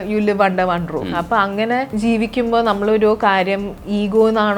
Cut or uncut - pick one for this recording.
cut